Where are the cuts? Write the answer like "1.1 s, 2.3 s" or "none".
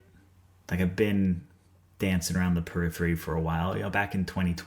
none